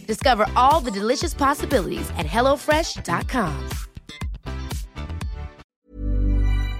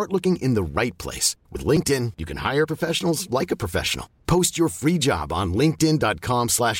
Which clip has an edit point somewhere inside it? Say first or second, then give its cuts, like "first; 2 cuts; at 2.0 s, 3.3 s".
first; 1 cut; at 5.6 s